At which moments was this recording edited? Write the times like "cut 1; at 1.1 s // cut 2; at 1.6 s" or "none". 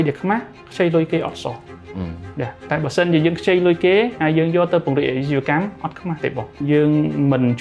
cut 1; at 6.6 s